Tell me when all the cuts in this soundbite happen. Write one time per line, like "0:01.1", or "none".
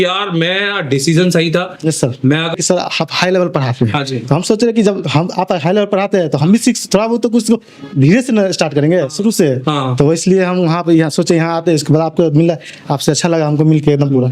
0:02.5